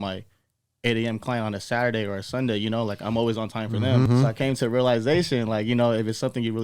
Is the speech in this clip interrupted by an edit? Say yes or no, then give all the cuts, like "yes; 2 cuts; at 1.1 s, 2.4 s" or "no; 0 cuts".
yes; 1 cut; at 4.1 s